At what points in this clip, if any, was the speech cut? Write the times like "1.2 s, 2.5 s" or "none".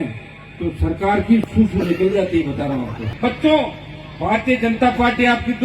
3.0 s